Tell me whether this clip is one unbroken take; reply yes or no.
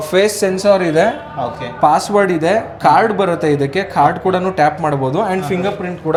yes